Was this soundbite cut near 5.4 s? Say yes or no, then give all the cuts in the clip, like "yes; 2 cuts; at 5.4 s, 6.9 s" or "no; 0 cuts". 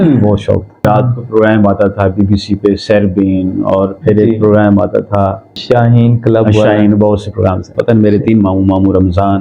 no; 2 cuts; at 0.8 s, 7.7 s